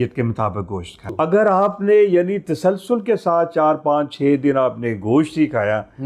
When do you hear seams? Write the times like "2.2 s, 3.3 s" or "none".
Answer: 1.1 s